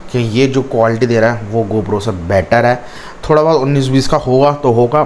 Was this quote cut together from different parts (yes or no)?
no